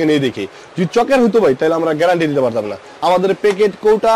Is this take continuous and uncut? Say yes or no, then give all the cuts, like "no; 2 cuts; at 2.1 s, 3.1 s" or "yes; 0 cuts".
no; 1 cut; at 2.8 s